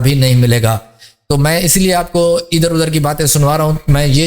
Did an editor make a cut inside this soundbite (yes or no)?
yes